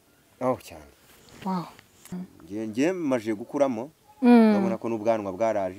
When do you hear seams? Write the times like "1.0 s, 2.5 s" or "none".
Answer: 2.1 s